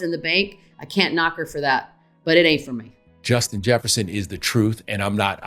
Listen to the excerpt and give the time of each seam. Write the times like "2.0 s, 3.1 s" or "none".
3.2 s